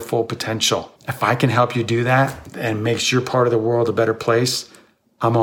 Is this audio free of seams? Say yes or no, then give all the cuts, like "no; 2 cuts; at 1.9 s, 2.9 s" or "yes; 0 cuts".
no; 1 cut; at 1.0 s